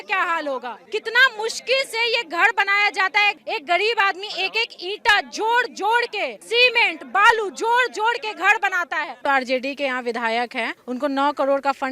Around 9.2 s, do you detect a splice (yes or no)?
yes